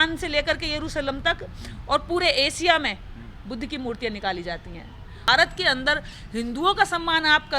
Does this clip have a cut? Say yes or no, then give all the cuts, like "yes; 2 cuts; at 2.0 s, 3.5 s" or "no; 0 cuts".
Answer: yes; 1 cut; at 5.2 s